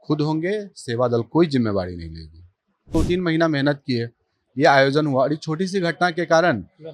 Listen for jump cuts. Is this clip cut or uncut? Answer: cut